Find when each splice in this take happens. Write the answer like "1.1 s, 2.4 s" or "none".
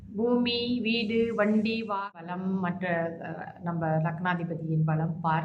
2.0 s